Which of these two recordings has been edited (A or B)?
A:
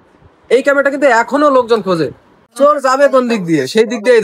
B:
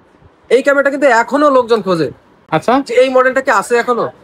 A